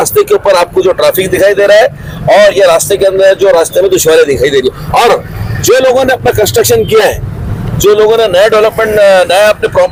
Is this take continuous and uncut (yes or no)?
yes